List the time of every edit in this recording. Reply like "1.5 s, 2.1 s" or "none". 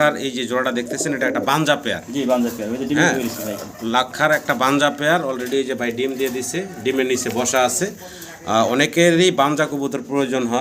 none

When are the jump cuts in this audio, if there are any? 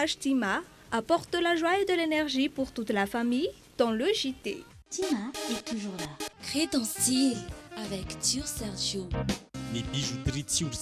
6.3 s

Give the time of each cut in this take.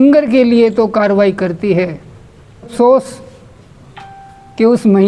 2.7 s

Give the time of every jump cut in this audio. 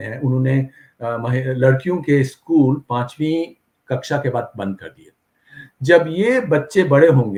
none

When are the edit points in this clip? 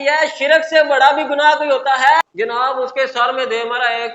2.2 s

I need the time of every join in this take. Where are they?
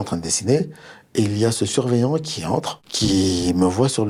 none

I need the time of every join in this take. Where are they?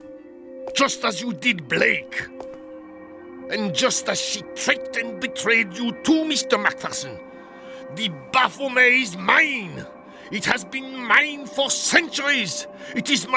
none

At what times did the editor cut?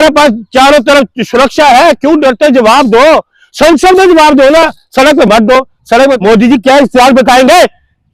6.2 s

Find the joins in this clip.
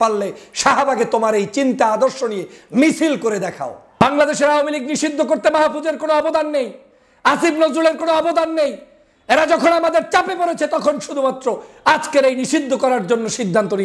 4.0 s

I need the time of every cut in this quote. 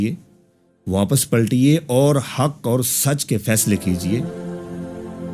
4.3 s

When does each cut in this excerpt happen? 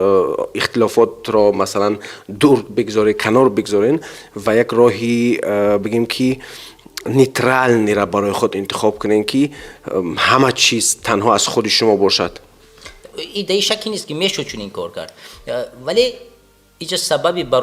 none

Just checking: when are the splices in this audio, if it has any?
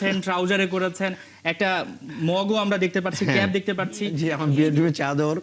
4.2 s

